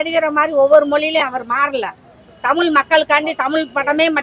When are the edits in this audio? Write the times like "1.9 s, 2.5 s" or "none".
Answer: none